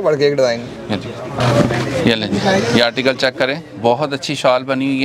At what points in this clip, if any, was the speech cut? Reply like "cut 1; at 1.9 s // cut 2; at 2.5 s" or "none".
cut 1; at 1.4 s

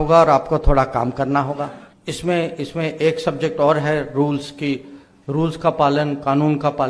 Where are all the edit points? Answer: cut 1; at 1.9 s

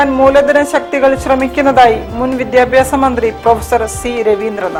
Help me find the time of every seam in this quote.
none

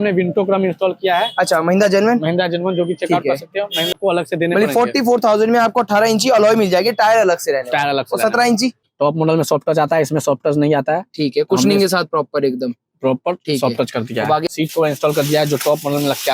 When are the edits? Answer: cut 1; at 3.9 s // cut 2; at 8.9 s // cut 3; at 14.5 s

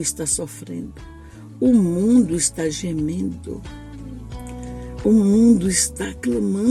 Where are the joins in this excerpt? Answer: none

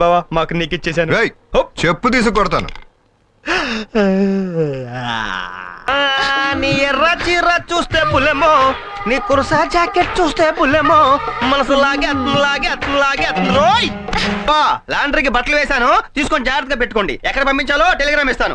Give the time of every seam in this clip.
cut 1; at 5.9 s // cut 2; at 14.5 s

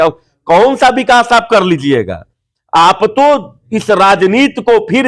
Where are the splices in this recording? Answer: none

